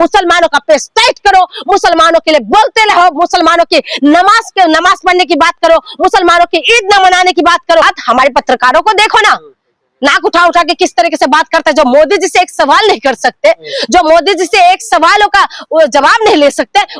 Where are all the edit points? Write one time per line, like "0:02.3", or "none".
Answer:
0:07.9